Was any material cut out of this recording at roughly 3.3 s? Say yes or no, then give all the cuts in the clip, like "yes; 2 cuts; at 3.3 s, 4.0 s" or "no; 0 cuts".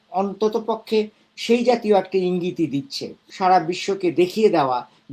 yes; 1 cut; at 3.3 s